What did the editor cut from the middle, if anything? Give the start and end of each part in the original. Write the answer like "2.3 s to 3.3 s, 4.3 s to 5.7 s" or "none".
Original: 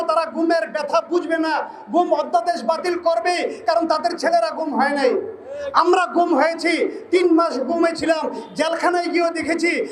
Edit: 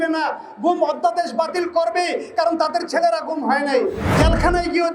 5.3 s to 8.4 s